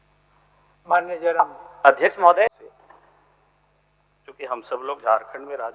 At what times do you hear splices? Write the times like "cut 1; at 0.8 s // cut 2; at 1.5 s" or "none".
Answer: cut 1; at 2.5 s